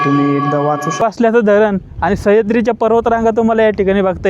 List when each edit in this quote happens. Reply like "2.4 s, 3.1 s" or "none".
1.0 s